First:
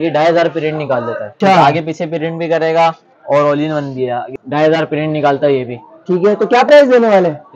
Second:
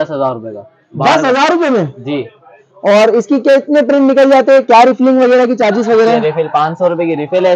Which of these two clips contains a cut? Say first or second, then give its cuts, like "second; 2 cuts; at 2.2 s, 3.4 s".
first; 2 cuts; at 1.3 s, 4.3 s